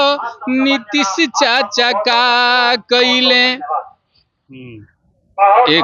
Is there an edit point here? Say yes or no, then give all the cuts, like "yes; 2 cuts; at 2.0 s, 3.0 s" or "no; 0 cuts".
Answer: no; 0 cuts